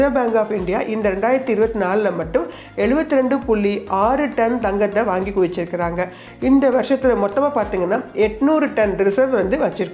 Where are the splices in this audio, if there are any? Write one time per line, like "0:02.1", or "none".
none